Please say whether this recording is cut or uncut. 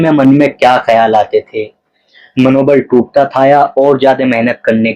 uncut